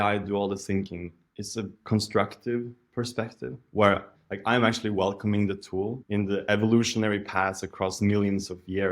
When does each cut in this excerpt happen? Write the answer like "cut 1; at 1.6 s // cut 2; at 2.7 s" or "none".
cut 1; at 1.6 s // cut 2; at 6.0 s